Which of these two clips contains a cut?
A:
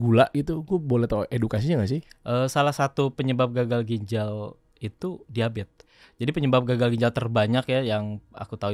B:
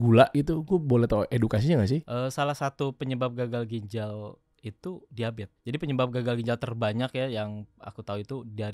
B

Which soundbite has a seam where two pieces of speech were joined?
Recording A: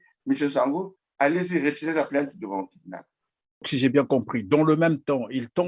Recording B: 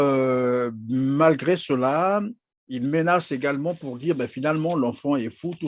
A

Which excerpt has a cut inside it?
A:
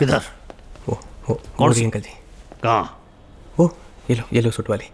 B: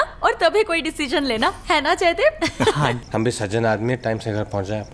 B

